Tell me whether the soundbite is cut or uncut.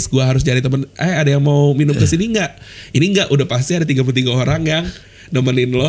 uncut